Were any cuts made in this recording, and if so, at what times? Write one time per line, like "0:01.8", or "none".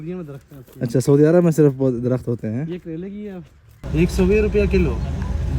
0:03.8

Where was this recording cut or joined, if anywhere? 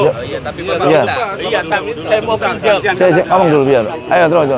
none

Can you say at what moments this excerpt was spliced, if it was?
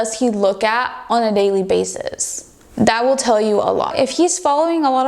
0:03.9

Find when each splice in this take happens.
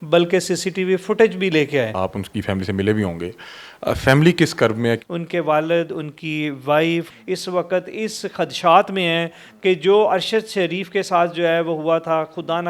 0:01.9
0:05.0
0:07.1

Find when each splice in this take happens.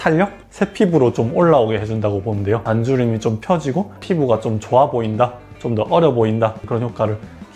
0:02.6
0:04.0

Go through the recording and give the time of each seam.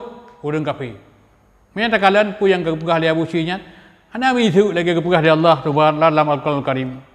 none

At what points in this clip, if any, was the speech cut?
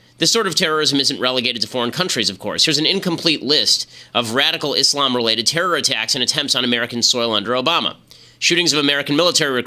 0:06.7

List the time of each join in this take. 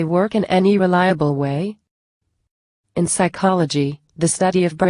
none

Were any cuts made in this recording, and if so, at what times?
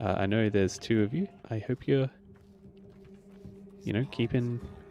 0:01.5

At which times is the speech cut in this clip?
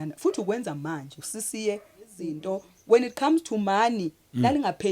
0:02.3

